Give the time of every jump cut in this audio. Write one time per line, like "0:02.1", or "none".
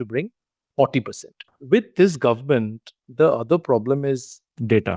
0:01.5